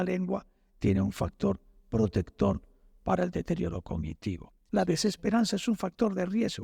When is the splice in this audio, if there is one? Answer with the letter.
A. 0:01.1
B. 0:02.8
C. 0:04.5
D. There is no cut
C